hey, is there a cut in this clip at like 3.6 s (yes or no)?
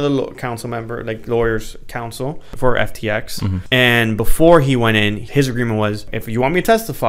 yes